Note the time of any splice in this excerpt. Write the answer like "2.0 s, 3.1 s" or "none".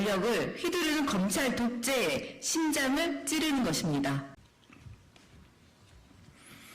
4.3 s